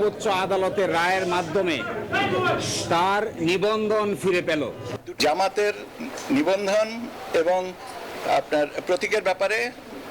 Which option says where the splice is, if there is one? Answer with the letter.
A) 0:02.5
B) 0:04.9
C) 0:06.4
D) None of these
B